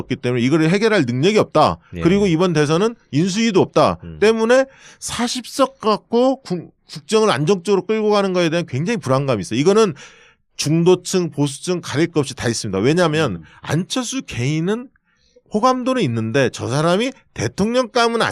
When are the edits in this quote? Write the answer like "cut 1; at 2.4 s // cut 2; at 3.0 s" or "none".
cut 1; at 14.5 s